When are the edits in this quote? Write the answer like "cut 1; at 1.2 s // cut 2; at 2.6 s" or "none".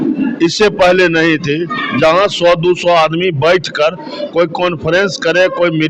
none

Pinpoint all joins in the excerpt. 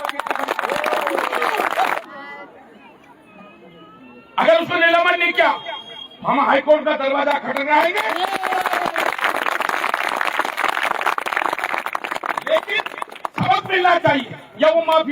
cut 1; at 2.0 s

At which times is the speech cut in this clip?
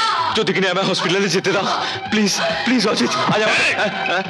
none

